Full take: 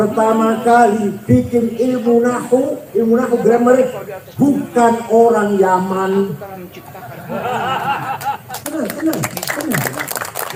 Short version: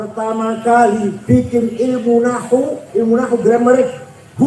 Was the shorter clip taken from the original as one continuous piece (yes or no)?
yes